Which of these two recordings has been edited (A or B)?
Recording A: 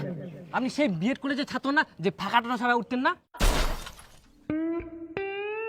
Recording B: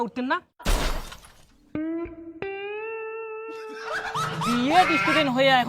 B